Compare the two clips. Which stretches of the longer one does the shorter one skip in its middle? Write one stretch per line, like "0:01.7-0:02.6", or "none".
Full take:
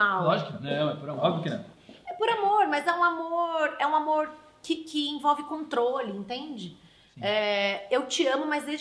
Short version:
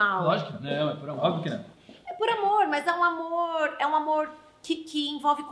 none